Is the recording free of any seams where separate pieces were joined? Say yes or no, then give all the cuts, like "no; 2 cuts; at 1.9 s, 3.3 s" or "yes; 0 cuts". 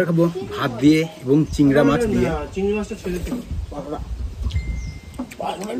yes; 0 cuts